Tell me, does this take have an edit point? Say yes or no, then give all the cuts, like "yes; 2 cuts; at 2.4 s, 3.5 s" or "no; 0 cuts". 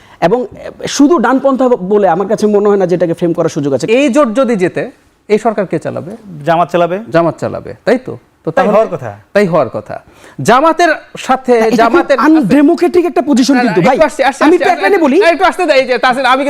yes; 1 cut; at 3.8 s